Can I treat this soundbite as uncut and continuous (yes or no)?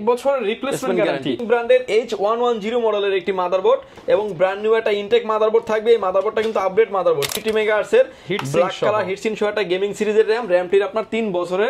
no